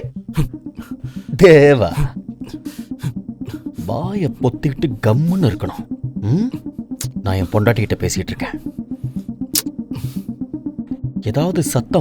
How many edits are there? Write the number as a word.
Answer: zero